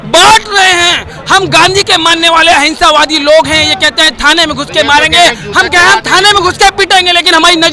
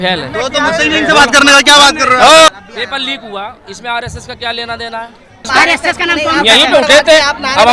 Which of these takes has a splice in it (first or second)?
second